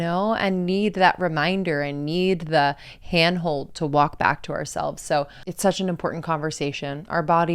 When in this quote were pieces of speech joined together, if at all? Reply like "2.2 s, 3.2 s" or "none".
5.4 s